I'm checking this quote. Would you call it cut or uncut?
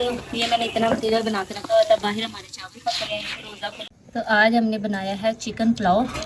cut